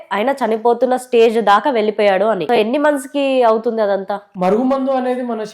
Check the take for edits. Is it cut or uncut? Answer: cut